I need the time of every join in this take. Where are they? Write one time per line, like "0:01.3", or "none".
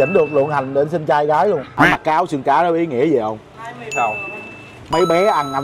0:01.7
0:03.5